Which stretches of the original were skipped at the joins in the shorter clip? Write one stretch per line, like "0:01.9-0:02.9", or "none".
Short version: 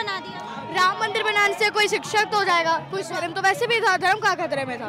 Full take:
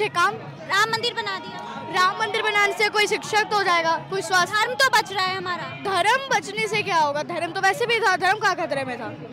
0:04.3-0:07.3